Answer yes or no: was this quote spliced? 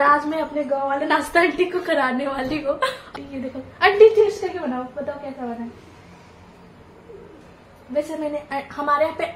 yes